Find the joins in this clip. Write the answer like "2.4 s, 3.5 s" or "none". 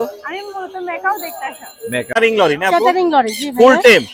2.1 s

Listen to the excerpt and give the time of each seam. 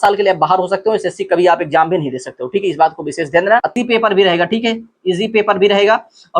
3.7 s

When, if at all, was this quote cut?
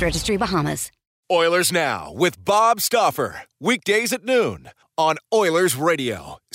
1.1 s

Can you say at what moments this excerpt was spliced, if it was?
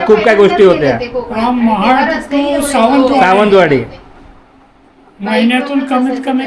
none

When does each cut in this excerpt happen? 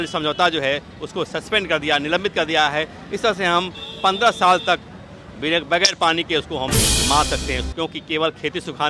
7.7 s

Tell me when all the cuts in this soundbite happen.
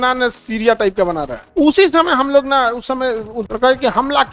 1.5 s, 3.4 s

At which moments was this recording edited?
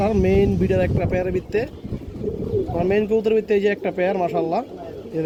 none

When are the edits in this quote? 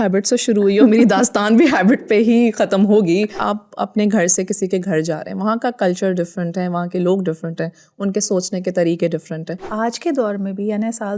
3.4 s, 9.7 s

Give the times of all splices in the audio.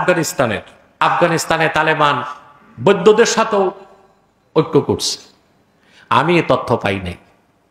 1.0 s

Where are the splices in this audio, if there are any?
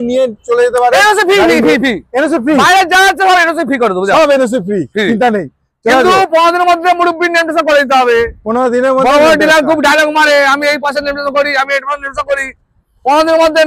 none

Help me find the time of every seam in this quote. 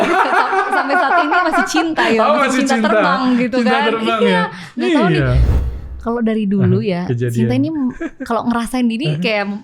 5.5 s

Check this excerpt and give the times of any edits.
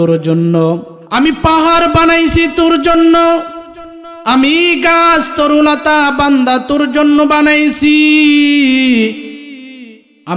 0.9 s

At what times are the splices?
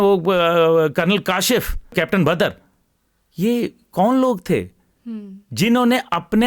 1.9 s

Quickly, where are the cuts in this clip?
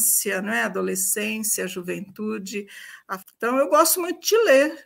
3.1 s

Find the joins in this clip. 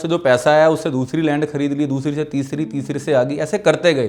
none

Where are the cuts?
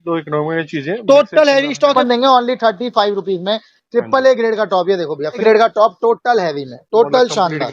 1.9 s, 5.4 s

